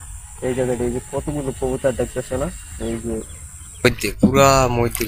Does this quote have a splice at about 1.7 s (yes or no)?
no